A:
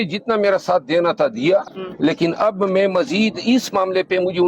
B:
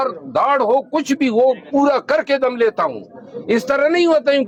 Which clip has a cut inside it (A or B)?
A